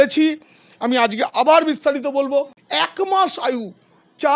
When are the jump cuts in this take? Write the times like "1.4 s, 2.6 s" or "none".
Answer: 2.6 s